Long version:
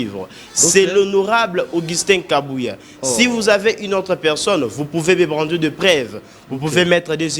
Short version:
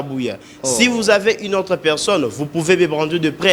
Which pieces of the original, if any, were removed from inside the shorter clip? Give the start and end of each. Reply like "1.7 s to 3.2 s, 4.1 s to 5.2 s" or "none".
none